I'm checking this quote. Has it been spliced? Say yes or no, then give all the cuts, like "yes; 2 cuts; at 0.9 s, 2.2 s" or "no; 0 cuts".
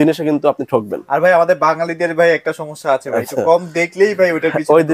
no; 0 cuts